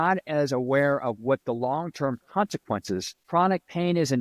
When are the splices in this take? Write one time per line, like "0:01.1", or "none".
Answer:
0:03.1